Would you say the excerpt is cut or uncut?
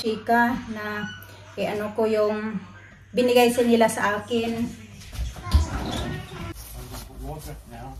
cut